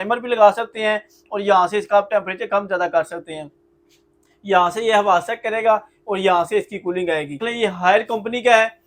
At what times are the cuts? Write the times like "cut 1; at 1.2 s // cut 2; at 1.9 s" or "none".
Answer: cut 1; at 7.5 s